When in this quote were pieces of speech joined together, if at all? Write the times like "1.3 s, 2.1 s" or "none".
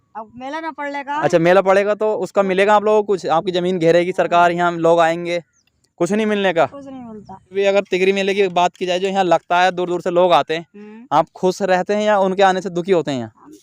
7.5 s